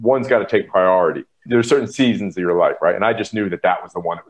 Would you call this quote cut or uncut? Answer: cut